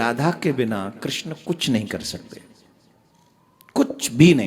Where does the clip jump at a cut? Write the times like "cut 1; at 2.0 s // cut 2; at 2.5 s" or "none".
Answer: none